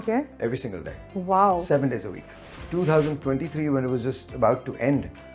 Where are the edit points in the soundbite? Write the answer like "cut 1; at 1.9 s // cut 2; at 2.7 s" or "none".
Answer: cut 1; at 2.5 s